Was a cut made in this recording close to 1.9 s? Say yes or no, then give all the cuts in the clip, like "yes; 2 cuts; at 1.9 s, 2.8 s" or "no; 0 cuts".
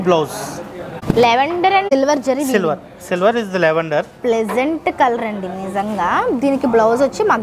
yes; 2 cuts; at 1.0 s, 1.9 s